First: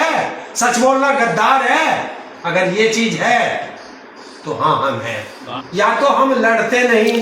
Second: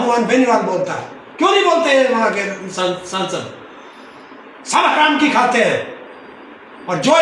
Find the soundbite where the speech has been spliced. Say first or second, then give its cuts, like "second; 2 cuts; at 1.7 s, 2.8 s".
first; 1 cut; at 5.5 s